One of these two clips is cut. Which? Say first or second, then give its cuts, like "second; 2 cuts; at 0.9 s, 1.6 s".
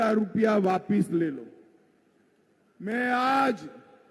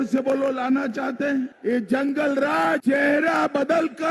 second; 2 cuts; at 1.5 s, 2.8 s